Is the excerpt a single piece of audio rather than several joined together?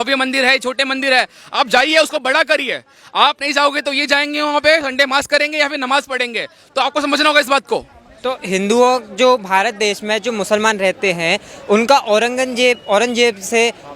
yes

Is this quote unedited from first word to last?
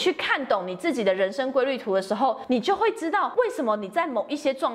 no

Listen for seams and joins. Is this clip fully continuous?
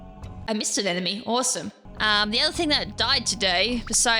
yes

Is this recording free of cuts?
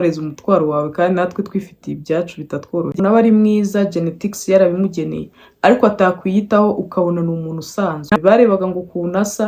no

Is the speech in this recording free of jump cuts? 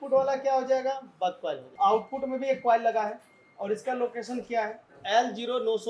no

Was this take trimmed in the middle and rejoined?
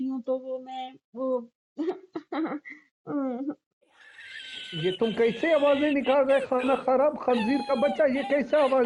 no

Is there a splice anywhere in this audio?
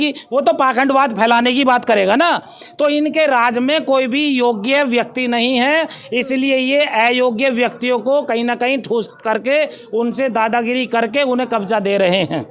no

